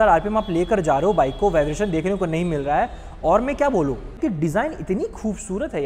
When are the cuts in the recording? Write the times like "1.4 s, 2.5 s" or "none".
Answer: 4.2 s